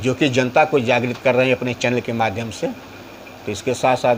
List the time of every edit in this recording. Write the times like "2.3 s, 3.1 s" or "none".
none